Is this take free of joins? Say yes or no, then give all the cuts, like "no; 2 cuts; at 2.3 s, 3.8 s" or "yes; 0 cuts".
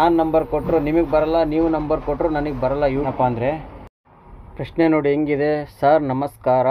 no; 1 cut; at 3.1 s